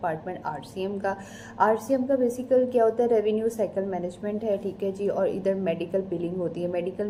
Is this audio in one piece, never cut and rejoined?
yes; 0 cuts

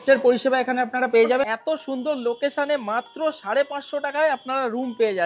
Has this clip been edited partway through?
yes; 1 cut; at 1.5 s

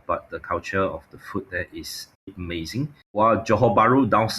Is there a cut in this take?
yes; 1 cut; at 2.7 s

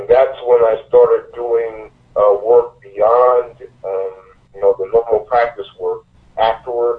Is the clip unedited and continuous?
yes; 0 cuts

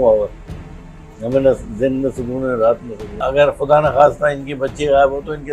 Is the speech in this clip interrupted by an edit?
yes; 1 cut; at 3.2 s

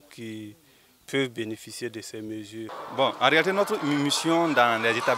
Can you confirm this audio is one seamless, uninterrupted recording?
no; 1 cut; at 2.8 s

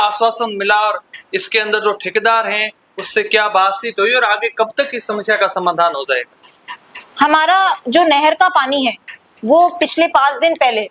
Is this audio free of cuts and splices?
yes; 0 cuts

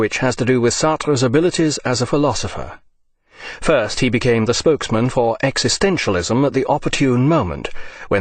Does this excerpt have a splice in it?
no; 0 cuts

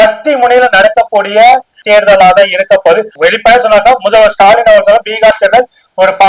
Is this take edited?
yes; 2 cuts; at 1.8 s, 3.1 s

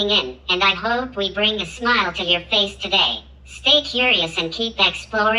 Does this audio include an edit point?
no; 0 cuts

